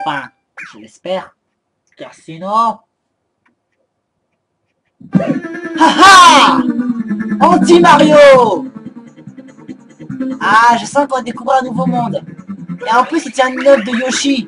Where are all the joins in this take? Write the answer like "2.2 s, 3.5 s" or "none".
7.9 s